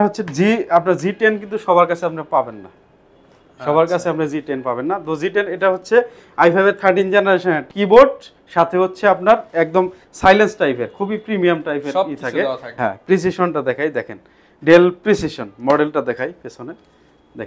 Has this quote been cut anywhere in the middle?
yes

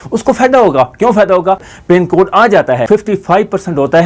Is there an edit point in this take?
yes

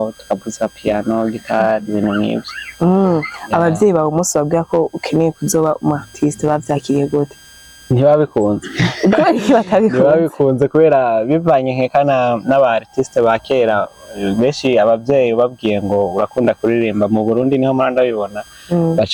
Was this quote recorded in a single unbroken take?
yes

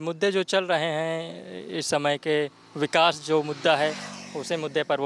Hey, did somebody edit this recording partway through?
no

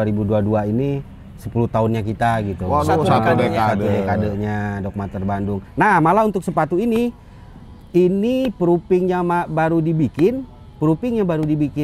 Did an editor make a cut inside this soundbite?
yes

